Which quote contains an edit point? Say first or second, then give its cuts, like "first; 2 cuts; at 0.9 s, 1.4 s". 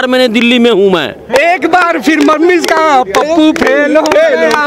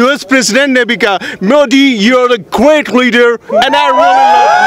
first; 1 cut; at 1.3 s